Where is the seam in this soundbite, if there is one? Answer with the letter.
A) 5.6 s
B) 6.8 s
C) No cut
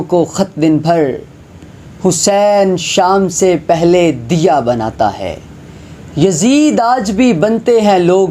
C